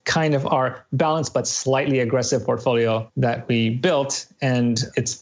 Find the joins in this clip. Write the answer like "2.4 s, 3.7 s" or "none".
3.1 s